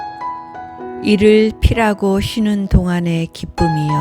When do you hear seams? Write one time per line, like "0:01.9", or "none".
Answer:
0:01.0